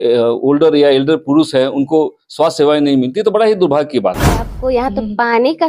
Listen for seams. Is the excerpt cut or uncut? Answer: cut